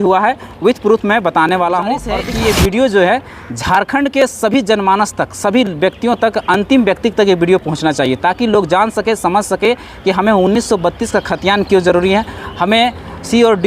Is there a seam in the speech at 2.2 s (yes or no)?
yes